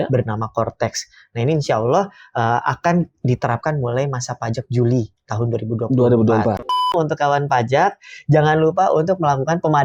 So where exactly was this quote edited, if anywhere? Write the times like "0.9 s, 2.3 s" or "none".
6.9 s